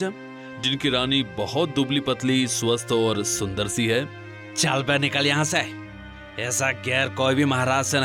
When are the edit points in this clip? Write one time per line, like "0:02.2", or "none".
0:04.3